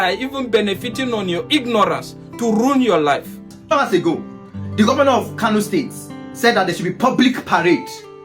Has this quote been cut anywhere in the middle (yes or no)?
yes